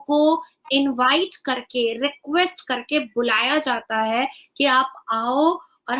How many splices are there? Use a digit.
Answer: 0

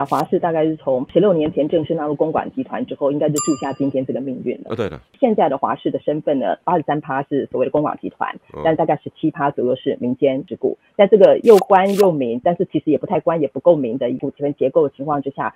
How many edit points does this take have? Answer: 5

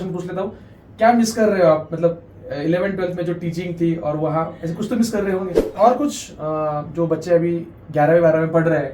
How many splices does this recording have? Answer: 1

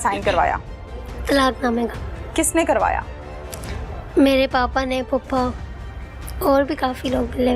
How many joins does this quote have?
0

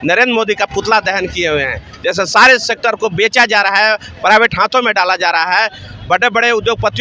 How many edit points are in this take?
0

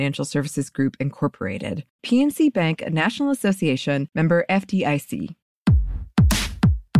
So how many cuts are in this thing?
1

